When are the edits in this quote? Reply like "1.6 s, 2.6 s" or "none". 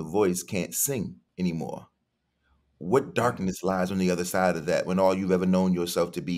1.2 s